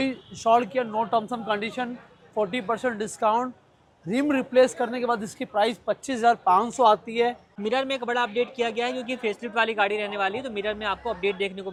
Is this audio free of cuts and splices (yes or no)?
yes